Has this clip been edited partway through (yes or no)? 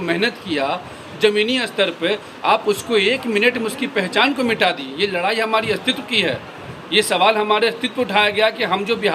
no